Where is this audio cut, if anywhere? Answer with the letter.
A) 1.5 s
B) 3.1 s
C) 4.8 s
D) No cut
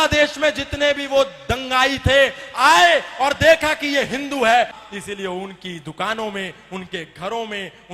C